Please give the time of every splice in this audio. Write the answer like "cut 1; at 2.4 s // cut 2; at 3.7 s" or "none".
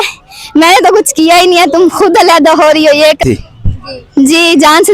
cut 1; at 3.2 s